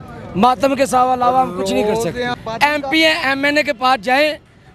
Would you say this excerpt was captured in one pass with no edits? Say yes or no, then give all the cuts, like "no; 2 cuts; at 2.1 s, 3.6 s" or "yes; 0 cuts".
no; 1 cut; at 2.3 s